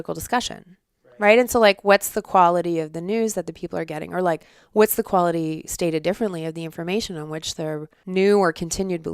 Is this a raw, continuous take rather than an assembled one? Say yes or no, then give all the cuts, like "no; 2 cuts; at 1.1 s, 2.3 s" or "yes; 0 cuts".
no; 1 cut; at 7.9 s